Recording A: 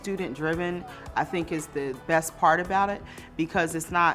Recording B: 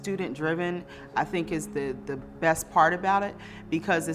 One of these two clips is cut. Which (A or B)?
A